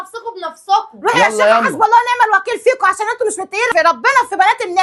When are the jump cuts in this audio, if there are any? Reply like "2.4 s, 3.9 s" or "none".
3.7 s